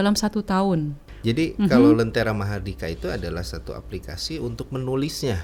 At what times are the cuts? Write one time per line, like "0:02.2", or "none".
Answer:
0:01.1